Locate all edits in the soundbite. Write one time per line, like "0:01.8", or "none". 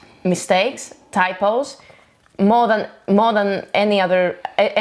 none